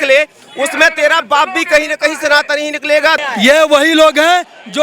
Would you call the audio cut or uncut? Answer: cut